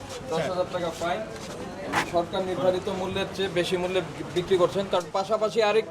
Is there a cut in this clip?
no; 0 cuts

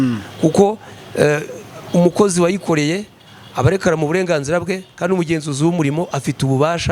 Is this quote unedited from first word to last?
yes; 0 cuts

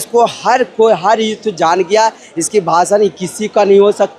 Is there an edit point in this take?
no; 0 cuts

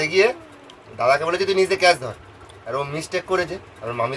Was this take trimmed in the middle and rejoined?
no; 0 cuts

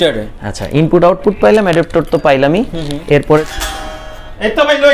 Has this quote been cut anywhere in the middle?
yes; 1 cut; at 3.4 s

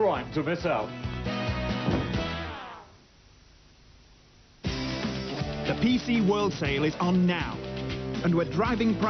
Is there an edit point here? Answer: no; 0 cuts

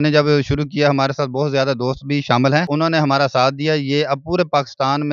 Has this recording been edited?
yes; 1 cut; at 2.7 s

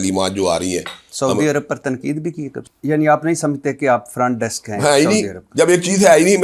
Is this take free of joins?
no; 1 cut; at 2.5 s

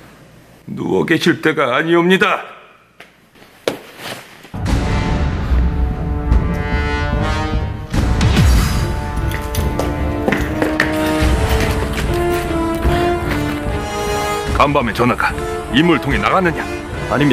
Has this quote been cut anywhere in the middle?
no; 0 cuts

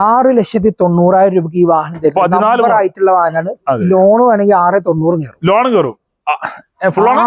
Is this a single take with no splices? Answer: yes; 0 cuts

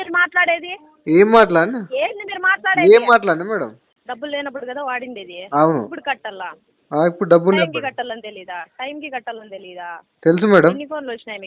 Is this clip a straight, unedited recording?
no; 1 cut; at 3.9 s

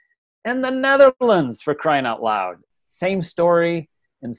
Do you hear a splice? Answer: yes; 1 cut; at 2.6 s

